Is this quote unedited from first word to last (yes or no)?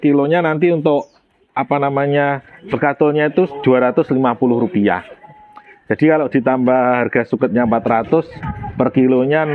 yes